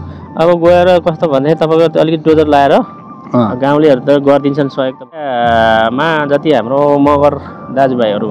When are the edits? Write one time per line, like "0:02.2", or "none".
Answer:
0:05.3